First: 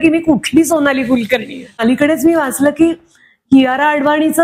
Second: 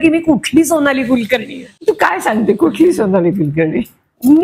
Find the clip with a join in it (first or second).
first